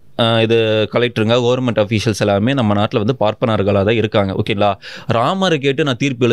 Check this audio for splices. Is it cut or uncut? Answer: uncut